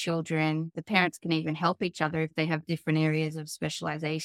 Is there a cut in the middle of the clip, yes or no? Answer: no